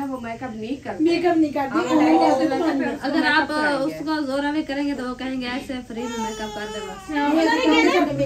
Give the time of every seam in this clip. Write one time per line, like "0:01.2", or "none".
none